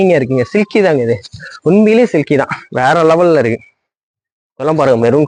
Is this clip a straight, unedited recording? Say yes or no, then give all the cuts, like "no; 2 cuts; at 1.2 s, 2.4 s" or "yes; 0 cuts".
yes; 0 cuts